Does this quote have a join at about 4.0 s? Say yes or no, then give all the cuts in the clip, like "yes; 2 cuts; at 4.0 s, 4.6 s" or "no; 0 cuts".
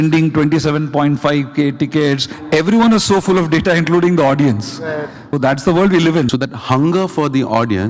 no; 3 cuts; at 2.3 s, 5.4 s, 6.3 s